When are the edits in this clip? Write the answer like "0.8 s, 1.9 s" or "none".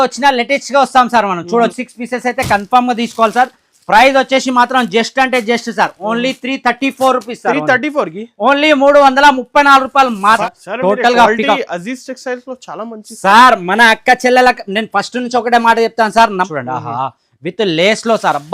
1.9 s, 10.4 s, 16.4 s

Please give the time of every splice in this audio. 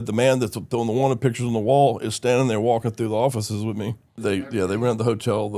4.2 s

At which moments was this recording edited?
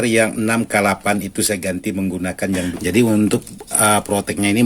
2.7 s

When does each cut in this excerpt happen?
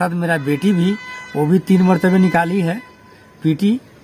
none

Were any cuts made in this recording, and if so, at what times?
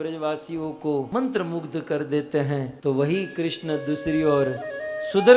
1.1 s, 2.7 s

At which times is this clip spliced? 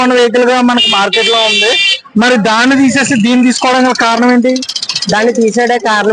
none

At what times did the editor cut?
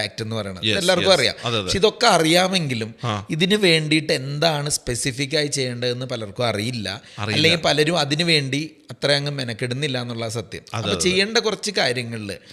none

